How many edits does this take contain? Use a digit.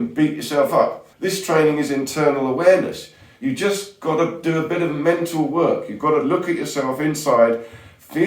1